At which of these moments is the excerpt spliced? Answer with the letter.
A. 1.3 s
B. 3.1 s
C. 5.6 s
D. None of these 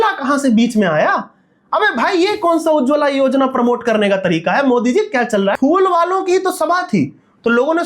C